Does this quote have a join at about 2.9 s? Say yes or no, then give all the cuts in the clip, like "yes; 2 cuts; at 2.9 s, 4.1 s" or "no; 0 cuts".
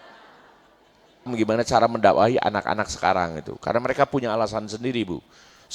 no; 1 cut; at 1.3 s